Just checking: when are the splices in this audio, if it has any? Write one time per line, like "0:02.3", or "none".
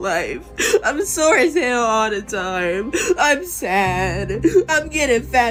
none